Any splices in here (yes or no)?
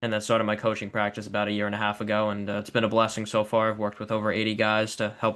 no